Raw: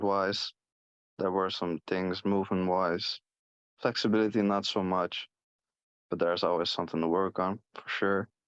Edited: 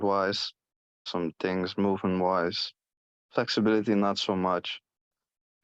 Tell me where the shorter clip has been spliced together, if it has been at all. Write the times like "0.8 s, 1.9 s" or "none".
1.1 s